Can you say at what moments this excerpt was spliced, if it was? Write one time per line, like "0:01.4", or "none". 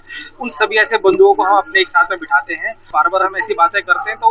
0:02.8